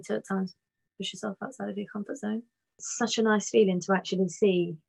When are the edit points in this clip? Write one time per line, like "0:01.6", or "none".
0:02.9